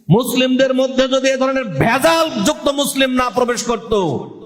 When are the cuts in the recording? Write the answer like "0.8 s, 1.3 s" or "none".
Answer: none